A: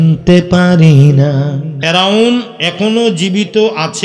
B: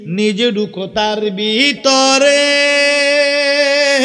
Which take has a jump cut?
A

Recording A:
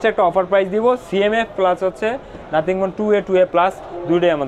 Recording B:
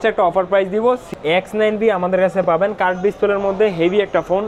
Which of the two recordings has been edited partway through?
B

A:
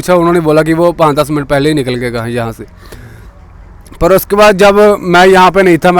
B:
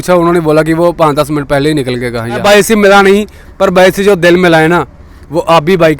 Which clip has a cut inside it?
B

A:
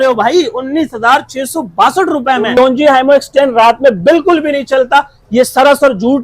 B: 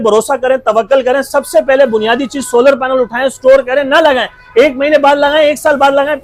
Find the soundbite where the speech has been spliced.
A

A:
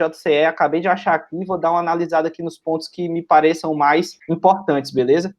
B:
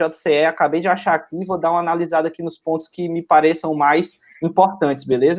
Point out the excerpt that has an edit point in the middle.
A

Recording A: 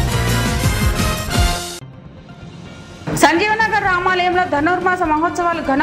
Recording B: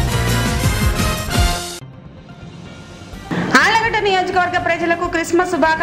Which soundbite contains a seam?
B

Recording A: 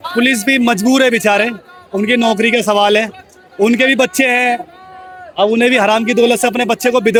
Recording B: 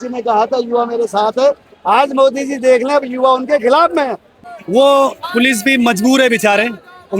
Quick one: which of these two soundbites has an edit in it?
B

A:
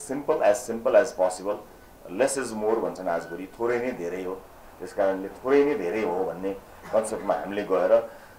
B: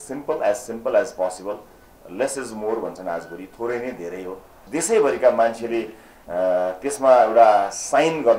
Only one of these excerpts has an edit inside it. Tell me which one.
B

